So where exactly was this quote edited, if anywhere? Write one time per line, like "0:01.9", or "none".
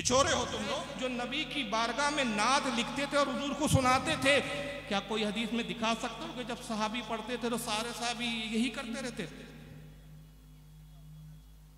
0:00.9